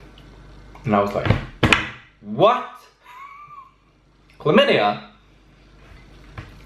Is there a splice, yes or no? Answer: no